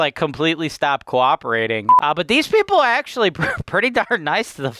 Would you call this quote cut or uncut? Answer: cut